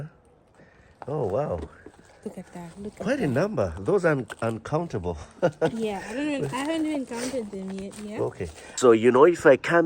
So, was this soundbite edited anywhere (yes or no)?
yes